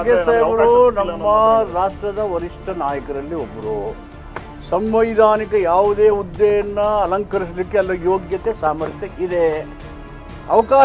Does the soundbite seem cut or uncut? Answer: uncut